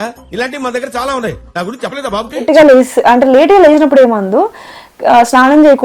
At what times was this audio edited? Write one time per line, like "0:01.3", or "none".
0:02.4